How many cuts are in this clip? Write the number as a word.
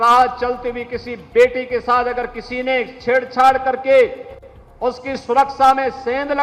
zero